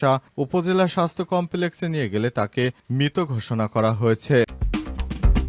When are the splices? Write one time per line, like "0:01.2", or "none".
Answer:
0:04.6